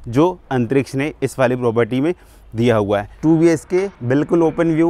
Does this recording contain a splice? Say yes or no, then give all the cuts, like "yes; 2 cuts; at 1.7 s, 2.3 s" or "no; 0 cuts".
yes; 1 cut; at 3.1 s